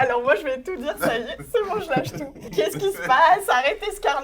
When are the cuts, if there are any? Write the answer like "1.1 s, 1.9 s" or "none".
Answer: 2.5 s